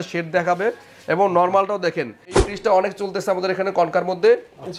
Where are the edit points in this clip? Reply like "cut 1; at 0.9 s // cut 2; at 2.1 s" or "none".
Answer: cut 1; at 2.4 s